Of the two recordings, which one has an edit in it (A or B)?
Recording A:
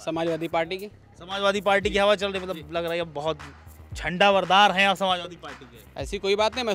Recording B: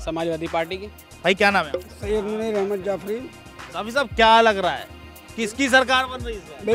B